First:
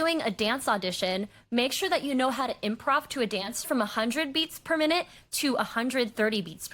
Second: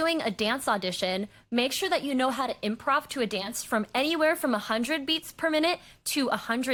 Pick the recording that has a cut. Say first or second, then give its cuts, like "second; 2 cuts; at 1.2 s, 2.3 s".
first; 1 cut; at 3.7 s